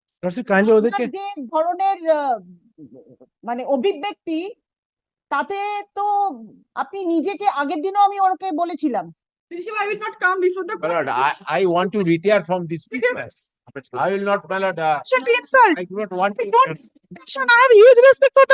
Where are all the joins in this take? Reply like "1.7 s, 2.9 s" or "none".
none